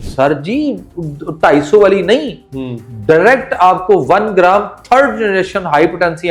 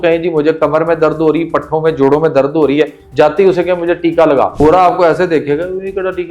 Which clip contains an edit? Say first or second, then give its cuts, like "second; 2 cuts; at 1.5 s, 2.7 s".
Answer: second; 1 cut; at 4.6 s